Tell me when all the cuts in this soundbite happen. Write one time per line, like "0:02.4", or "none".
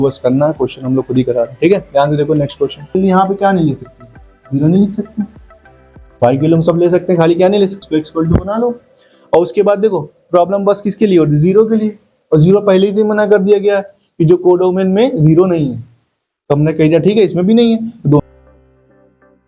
0:03.0
0:07.8
0:18.2